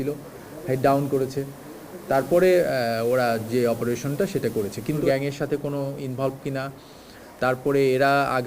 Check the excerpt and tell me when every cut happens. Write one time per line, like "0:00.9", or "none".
0:05.0